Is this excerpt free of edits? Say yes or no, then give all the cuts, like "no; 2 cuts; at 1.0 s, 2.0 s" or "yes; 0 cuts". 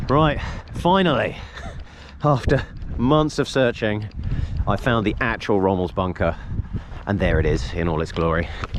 yes; 0 cuts